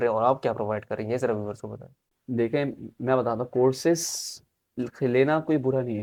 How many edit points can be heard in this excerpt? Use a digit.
0